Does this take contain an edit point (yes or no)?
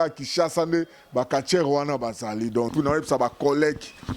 yes